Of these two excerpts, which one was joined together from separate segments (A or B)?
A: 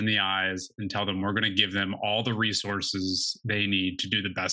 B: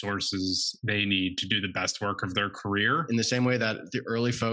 B